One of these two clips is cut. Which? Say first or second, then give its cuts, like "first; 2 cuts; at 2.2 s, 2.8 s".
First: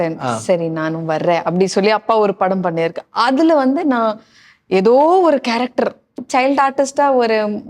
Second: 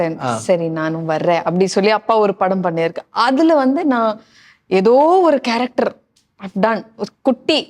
first; 1 cut; at 6.2 s